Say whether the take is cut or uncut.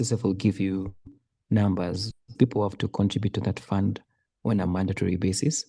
uncut